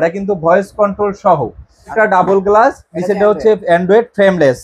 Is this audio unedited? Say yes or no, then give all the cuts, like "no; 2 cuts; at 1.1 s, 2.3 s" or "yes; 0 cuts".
no; 1 cut; at 1.9 s